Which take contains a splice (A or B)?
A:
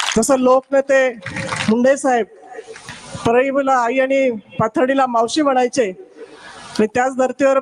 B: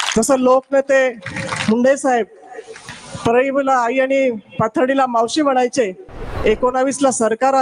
B